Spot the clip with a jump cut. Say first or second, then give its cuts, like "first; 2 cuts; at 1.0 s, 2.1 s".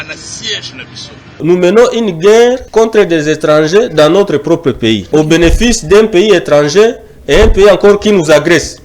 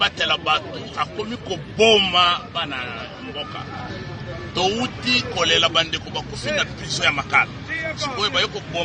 first; 3 cuts; at 1.4 s, 2.6 s, 5.0 s